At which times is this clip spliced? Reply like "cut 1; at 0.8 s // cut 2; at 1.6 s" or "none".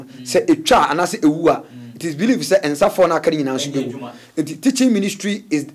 none